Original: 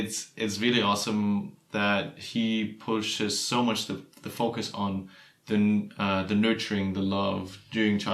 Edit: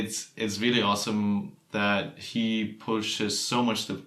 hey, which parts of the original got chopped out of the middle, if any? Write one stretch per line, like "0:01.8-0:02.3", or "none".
none